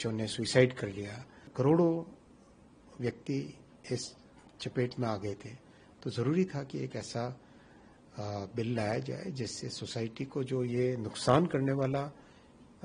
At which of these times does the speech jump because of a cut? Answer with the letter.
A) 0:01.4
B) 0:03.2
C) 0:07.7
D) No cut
A